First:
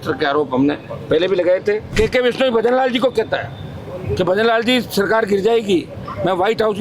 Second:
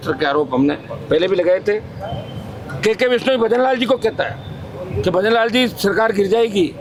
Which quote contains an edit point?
first; 1 cut; at 1.9 s

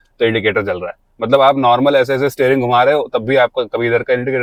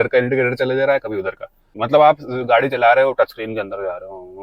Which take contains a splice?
second; 1 cut; at 1.7 s

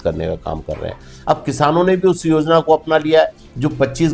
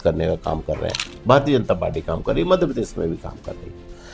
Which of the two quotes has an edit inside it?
second; 1 cut; at 1.1 s

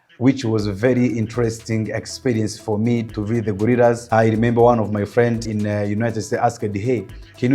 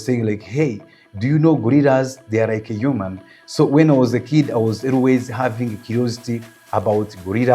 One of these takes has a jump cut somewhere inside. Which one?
first; 3 cuts; at 3.1 s, 4.0 s, 5.5 s

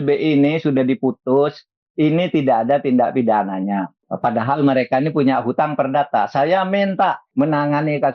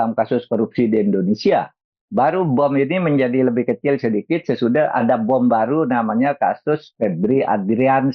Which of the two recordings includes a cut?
first; 2 cuts; at 4.0 s, 7.2 s

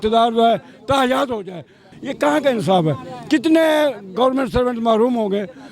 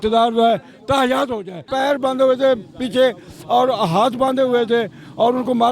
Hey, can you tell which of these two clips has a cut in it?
second; 1 cut; at 1.6 s

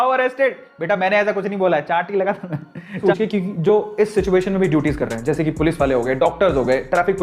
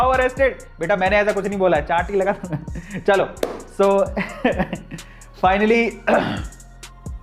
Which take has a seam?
first; 1 cut; at 3.0 s

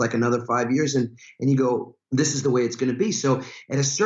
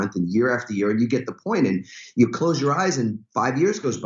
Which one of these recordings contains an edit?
first; 1 cut; at 2.0 s

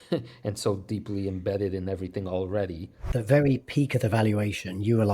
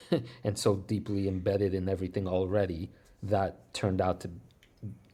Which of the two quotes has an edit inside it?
first; 1 cut; at 3.0 s

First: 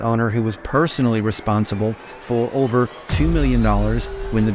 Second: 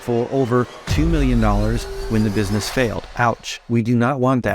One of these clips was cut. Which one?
second; 1 cut; at 3.3 s

